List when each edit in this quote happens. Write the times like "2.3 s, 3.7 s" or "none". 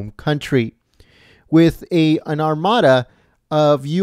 2.5 s